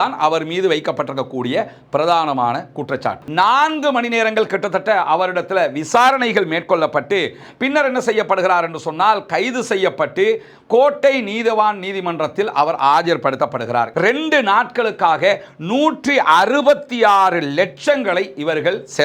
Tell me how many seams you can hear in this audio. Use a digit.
2